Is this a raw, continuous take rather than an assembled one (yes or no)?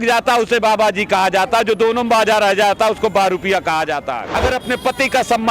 no